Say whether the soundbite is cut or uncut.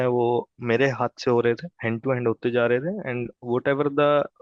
uncut